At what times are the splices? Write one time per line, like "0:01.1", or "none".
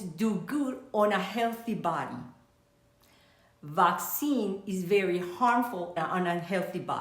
0:06.0